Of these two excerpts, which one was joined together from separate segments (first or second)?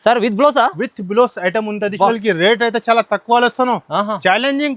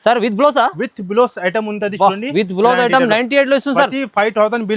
first